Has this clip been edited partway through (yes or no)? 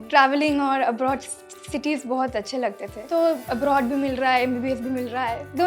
yes